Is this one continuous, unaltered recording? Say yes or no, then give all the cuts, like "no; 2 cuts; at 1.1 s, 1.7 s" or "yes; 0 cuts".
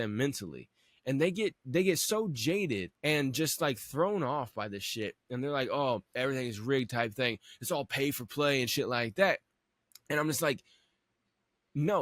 no; 2 cuts; at 2.9 s, 6.1 s